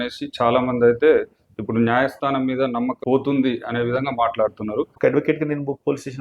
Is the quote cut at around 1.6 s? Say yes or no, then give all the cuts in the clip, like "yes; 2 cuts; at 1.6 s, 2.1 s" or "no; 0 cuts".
no; 2 cuts; at 3.0 s, 4.9 s